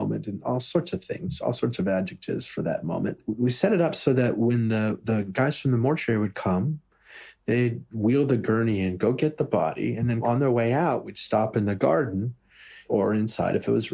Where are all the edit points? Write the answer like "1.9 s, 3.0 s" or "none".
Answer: 3.2 s